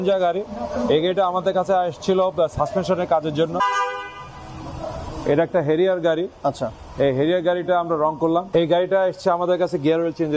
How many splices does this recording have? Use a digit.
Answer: 2